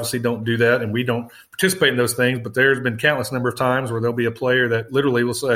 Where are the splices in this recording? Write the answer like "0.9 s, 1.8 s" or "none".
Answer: none